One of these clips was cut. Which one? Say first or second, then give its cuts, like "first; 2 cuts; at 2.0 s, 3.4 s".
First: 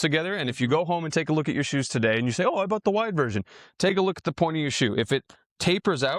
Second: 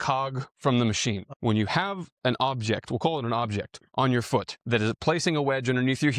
second; 2 cuts; at 1.3 s, 4.6 s